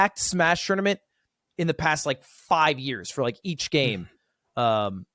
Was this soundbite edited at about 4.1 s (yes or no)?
no